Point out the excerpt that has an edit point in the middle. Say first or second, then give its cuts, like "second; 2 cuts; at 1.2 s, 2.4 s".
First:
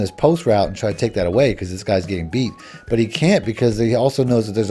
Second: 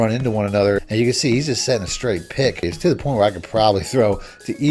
second; 2 cuts; at 0.8 s, 2.6 s